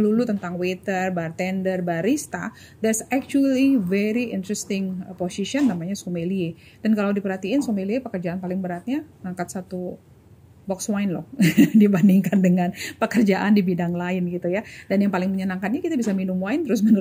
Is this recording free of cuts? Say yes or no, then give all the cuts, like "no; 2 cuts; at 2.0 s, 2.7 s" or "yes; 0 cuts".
yes; 0 cuts